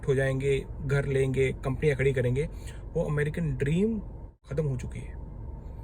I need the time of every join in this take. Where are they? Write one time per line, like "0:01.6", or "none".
0:04.4